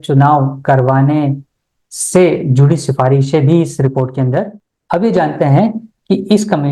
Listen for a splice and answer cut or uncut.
cut